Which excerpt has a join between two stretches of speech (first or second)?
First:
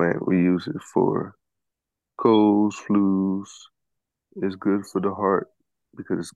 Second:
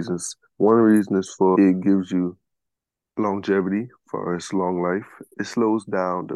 second